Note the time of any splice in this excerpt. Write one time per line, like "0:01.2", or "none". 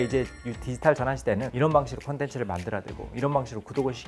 0:01.5